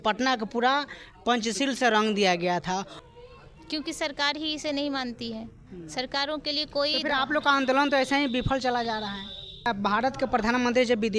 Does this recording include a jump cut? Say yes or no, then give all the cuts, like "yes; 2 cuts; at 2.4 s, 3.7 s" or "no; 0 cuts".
yes; 2 cuts; at 2.8 s, 9.5 s